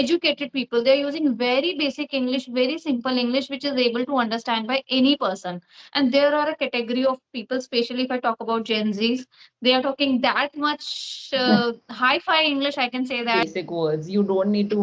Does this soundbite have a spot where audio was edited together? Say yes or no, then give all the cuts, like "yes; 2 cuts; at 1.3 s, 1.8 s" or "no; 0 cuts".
yes; 1 cut; at 13.4 s